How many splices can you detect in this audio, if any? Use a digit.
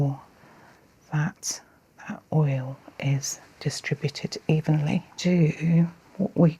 1